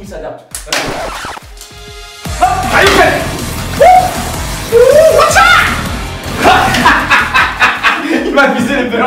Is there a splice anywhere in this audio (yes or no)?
no